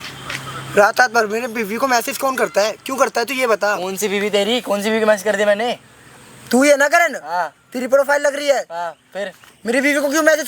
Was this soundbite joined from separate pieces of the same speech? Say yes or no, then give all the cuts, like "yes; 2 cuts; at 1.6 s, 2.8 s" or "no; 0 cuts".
no; 0 cuts